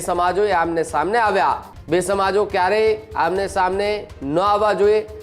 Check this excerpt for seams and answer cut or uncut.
cut